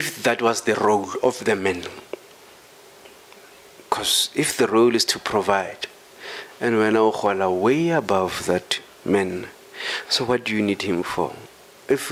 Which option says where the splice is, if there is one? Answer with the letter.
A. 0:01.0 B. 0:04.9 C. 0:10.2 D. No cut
D